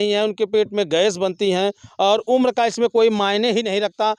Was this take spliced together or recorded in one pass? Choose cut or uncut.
uncut